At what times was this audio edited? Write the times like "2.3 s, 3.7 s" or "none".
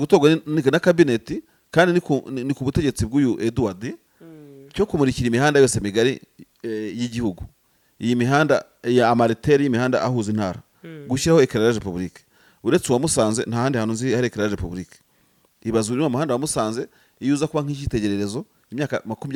none